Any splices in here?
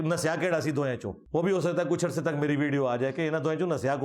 yes; 1 cut; at 1.2 s

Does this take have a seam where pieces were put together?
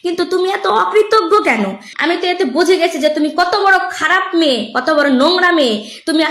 yes; 1 cut; at 1.9 s

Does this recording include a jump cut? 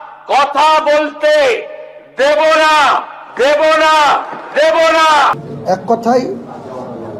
yes; 1 cut; at 5.4 s

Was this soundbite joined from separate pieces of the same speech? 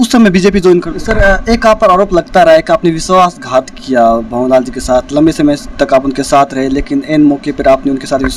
yes; 1 cut; at 1.0 s

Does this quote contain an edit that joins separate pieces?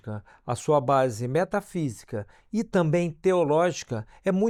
no; 0 cuts

